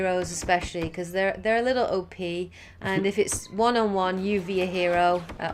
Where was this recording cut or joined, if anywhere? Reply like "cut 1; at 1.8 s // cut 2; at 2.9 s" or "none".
none